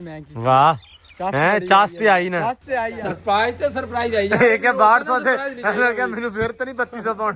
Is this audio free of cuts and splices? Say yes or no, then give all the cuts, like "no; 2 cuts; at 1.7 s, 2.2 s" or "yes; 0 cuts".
no; 1 cut; at 3.0 s